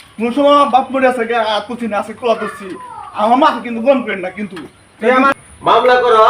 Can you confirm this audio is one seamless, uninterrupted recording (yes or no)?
no